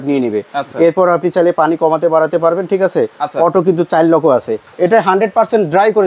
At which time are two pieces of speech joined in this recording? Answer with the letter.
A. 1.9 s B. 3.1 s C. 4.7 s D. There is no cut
C